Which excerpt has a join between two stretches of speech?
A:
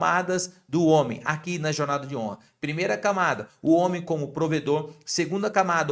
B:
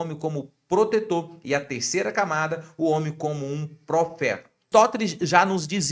B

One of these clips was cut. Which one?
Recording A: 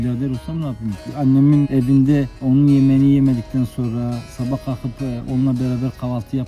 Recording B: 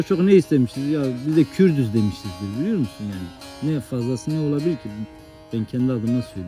A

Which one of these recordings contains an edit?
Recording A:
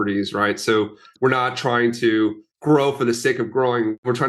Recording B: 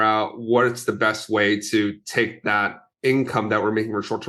A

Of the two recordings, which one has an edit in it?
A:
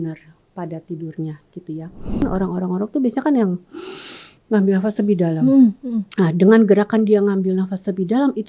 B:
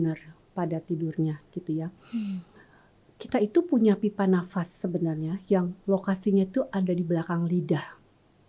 A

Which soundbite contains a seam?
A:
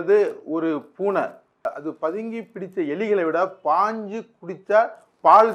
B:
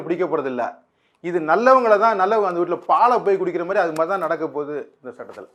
A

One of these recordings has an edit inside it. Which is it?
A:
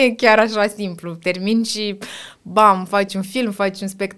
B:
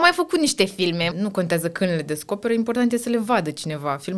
B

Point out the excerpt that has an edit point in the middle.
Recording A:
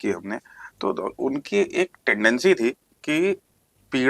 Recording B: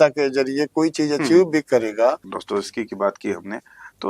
B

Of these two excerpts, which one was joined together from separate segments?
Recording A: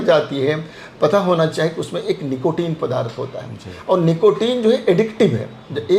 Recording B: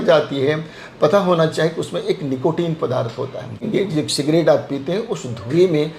B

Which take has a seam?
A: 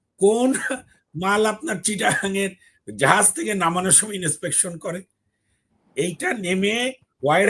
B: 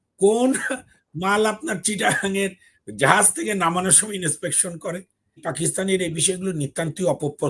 B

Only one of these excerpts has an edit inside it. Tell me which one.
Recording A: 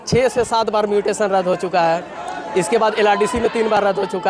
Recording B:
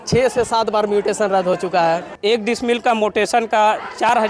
B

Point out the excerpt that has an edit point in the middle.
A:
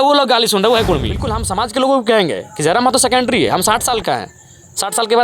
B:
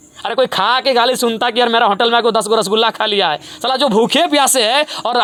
A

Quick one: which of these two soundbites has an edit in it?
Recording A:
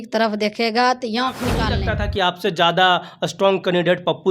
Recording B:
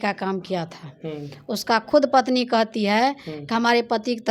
A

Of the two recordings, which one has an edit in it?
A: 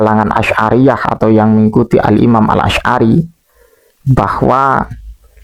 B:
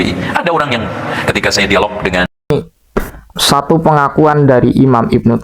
B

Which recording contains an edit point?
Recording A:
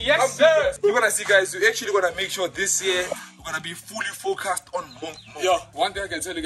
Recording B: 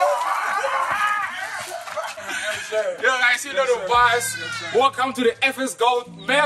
B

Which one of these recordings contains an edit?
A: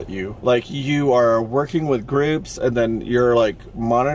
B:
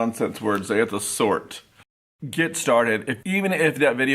B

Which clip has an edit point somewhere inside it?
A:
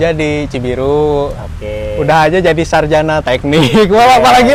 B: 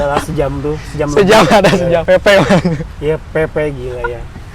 B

